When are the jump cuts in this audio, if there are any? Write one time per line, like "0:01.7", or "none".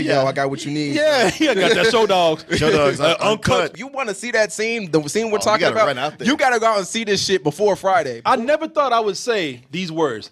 0:08.1

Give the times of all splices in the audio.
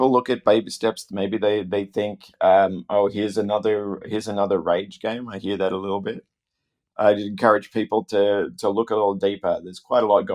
none

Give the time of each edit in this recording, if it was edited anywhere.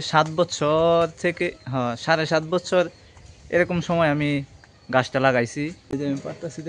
0:05.8

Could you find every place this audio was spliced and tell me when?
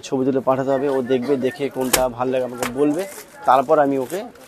none

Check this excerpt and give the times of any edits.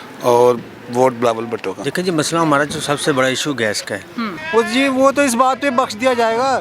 0:01.8
0:04.4

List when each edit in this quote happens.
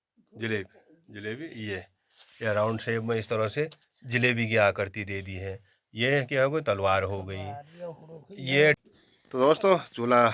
0:08.8

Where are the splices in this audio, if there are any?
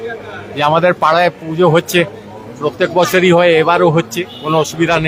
none

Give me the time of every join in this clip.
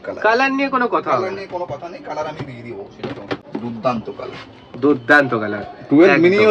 0:03.4

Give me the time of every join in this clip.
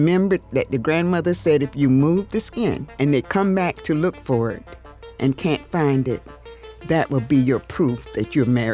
none

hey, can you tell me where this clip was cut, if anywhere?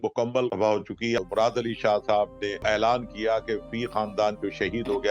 0:01.0
0:02.6

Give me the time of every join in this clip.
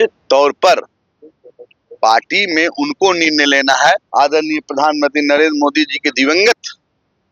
0:04.0

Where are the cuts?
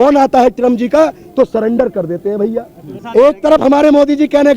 0:02.9

